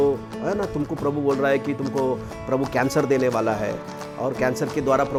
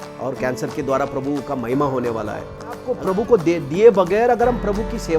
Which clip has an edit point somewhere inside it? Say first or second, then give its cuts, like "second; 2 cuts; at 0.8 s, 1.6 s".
second; 1 cut; at 2.9 s